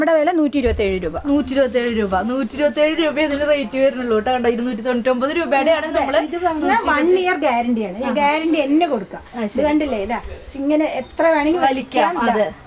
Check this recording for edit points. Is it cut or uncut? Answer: uncut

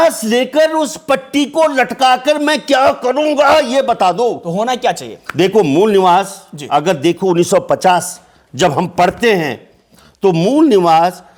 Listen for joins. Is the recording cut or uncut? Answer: uncut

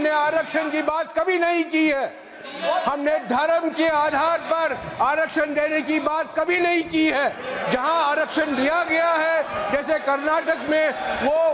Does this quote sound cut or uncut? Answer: uncut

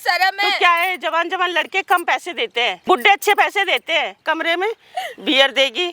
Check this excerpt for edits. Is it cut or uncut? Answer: cut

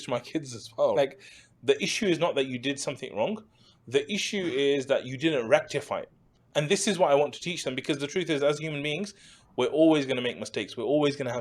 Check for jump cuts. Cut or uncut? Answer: cut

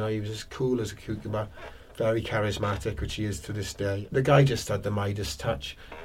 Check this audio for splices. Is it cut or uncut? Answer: cut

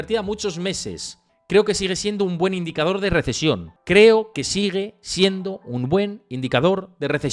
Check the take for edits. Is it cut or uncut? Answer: uncut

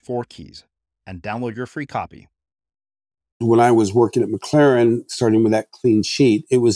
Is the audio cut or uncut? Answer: cut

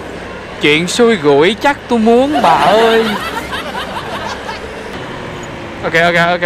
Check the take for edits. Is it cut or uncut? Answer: cut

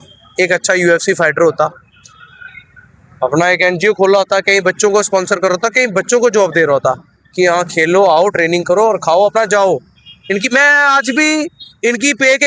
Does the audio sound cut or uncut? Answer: uncut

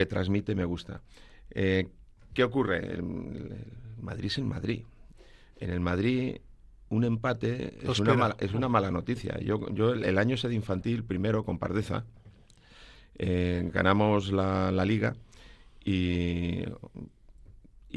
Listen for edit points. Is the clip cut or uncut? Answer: uncut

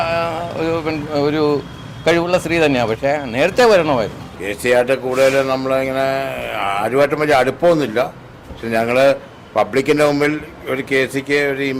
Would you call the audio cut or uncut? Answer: uncut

